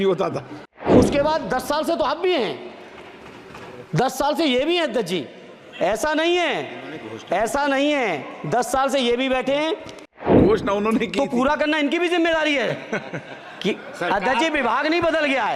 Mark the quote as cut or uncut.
cut